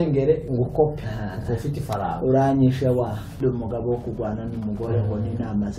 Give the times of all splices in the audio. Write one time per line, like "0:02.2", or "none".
0:03.3